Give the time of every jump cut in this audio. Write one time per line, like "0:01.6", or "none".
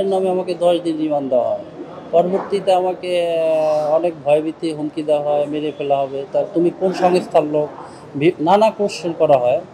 none